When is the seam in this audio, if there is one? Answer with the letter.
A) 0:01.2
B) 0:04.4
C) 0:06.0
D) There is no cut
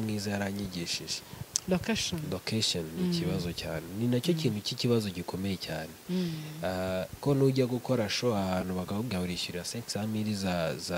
A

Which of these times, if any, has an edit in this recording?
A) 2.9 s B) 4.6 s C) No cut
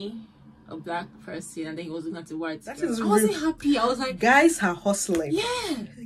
A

